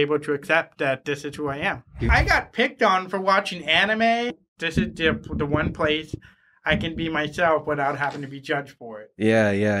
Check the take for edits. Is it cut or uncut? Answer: cut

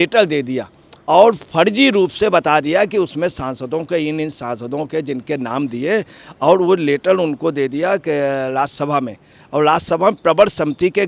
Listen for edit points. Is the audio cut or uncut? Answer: uncut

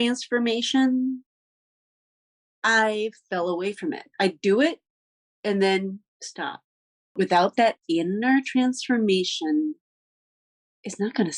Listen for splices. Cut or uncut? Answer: cut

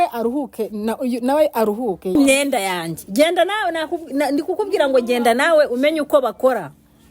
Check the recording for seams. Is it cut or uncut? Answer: cut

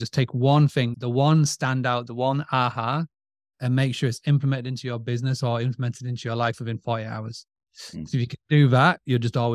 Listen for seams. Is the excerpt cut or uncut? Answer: uncut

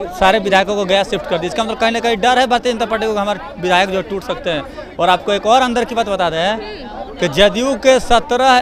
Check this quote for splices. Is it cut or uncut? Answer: uncut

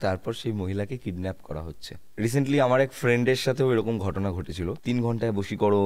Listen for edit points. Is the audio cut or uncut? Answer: cut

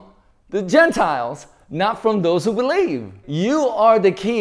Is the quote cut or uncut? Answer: uncut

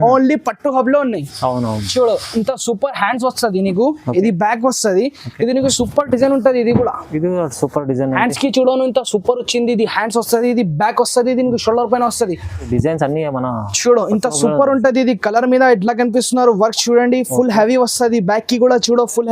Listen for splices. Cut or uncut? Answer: cut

